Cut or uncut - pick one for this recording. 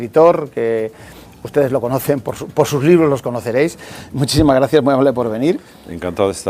cut